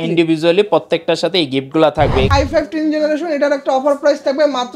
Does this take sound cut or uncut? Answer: cut